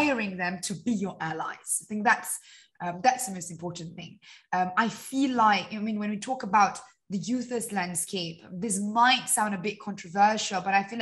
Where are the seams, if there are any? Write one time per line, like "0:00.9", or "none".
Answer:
none